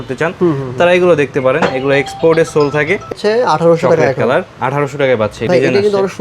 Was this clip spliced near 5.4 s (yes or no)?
yes